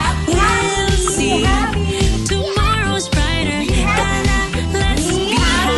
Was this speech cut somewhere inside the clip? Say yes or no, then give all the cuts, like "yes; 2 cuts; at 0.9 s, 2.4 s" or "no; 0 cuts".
no; 0 cuts